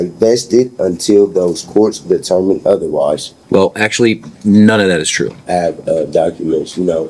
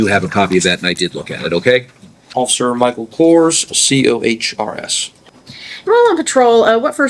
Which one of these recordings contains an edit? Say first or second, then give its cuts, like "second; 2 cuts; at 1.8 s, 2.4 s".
first; 2 cuts; at 3.3 s, 5.4 s